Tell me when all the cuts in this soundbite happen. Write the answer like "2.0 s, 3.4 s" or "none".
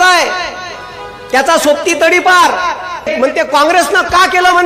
3.1 s